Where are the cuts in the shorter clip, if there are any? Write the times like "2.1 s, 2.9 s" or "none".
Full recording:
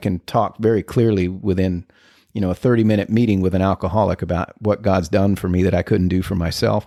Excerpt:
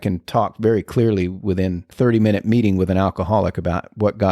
1.9 s